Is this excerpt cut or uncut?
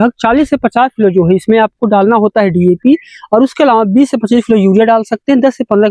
uncut